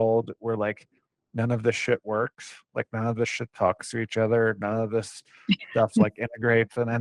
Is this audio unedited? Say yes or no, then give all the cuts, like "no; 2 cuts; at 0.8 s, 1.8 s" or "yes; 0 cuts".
yes; 0 cuts